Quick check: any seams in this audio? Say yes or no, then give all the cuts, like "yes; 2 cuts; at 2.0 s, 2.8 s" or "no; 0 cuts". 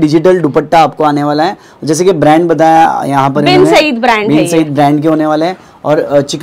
no; 0 cuts